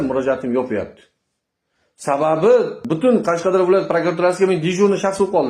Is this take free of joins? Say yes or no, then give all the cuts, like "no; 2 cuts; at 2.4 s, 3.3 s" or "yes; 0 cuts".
yes; 0 cuts